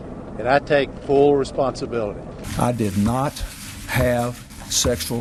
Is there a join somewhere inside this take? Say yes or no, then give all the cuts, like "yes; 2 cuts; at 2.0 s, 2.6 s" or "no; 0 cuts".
no; 0 cuts